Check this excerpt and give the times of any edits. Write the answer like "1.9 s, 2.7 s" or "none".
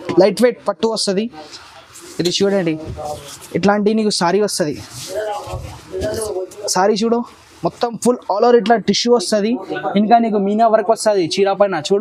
none